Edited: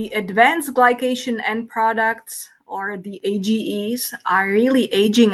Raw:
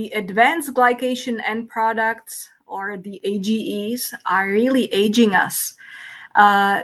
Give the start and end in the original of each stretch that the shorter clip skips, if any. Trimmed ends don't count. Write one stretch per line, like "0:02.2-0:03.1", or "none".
none